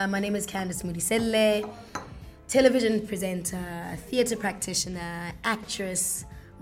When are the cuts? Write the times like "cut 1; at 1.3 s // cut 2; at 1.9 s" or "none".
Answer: none